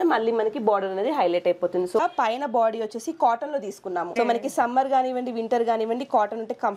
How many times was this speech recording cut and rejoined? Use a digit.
2